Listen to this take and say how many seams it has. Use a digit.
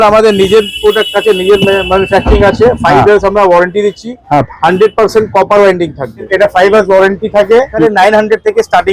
2